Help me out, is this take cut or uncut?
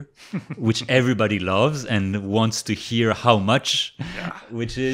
uncut